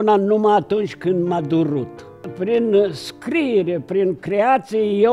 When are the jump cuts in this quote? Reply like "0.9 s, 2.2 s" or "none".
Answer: 2.2 s